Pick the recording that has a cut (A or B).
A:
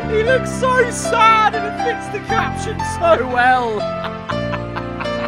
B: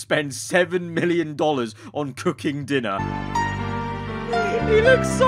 B